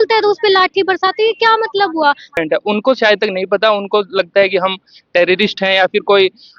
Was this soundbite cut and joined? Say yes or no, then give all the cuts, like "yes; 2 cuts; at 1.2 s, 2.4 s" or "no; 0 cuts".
yes; 1 cut; at 2.3 s